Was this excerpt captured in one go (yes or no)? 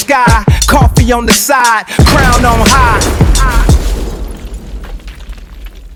yes